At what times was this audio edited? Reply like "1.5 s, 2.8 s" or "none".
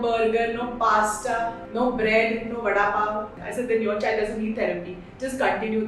1.6 s, 3.4 s